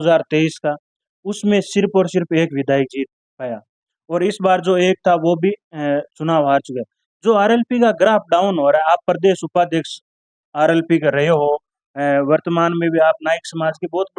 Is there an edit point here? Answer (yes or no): no